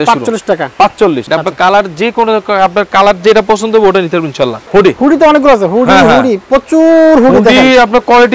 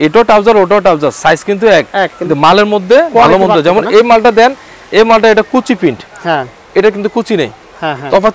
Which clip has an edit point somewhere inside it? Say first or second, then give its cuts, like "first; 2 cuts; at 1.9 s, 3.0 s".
first; 2 cuts; at 1.2 s, 4.6 s